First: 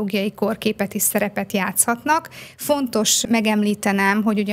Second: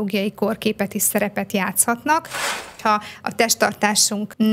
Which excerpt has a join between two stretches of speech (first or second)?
second